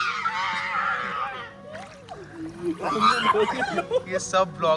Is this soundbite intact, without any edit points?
yes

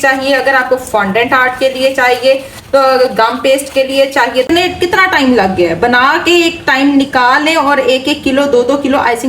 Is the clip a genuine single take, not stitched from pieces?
no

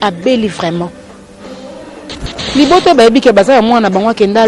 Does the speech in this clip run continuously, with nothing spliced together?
no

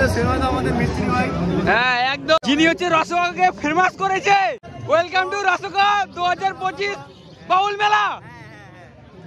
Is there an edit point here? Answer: yes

